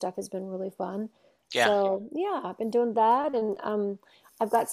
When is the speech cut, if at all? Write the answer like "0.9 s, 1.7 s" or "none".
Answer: none